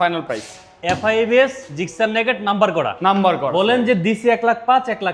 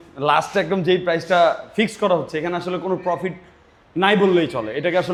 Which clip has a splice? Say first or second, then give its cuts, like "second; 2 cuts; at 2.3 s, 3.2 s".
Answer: first; 1 cut; at 3.9 s